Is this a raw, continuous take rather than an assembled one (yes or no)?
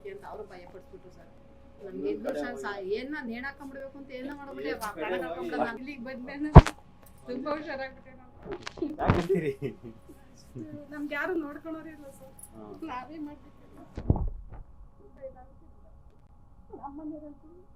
no